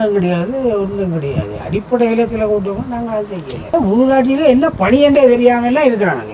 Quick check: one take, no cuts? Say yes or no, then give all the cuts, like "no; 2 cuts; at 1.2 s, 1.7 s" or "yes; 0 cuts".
no; 1 cut; at 3.7 s